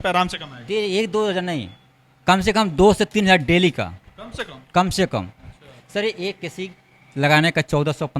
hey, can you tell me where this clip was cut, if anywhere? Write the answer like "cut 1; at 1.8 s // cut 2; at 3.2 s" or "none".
none